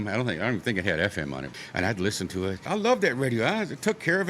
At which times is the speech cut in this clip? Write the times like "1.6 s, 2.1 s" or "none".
2.7 s